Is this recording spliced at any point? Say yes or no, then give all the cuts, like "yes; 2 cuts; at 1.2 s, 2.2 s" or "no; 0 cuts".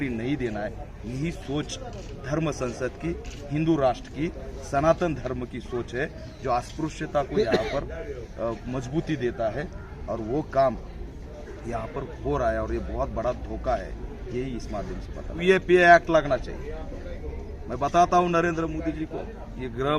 yes; 1 cut; at 15.4 s